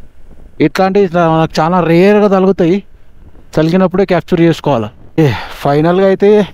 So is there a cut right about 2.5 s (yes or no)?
no